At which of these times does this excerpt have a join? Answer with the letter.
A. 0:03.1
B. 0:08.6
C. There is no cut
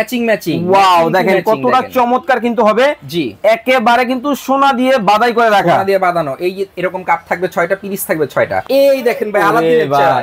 B